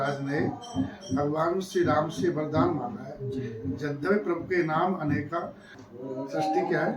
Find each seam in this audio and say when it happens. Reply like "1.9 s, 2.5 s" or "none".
5.8 s

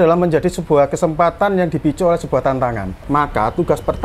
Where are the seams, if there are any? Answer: 2.9 s

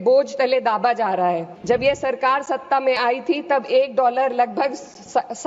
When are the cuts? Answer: 1.5 s

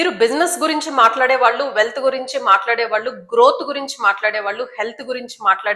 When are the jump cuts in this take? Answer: none

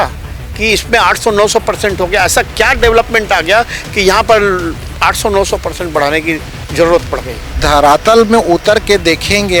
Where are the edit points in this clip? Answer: 7.6 s

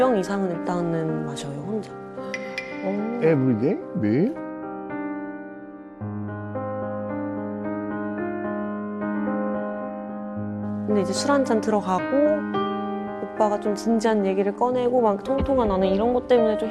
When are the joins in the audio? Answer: none

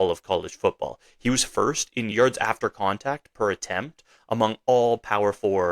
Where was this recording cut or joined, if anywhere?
2.1 s

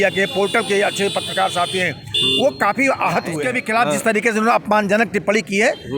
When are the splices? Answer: 3.6 s

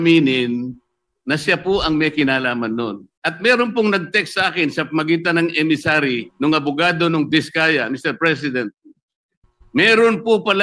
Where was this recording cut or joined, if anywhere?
3.1 s

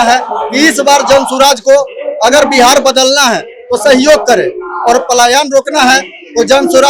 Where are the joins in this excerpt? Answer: none

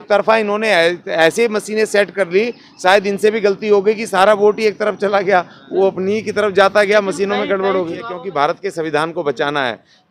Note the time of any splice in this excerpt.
8.2 s

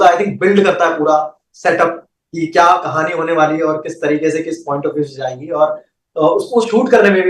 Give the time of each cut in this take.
none

